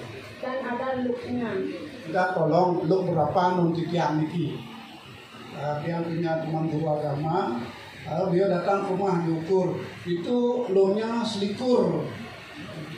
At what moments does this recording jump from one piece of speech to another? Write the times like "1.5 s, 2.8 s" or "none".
2.0 s